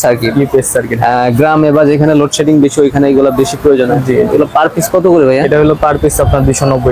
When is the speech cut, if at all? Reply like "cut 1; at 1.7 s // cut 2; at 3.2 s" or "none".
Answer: none